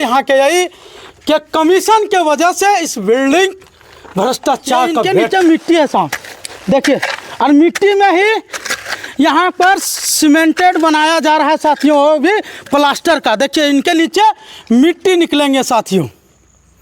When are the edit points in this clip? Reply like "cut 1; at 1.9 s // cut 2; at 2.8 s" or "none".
cut 1; at 5.0 s